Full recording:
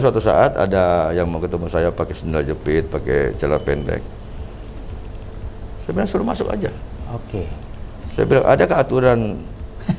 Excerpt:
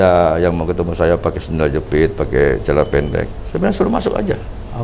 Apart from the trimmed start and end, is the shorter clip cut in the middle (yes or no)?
yes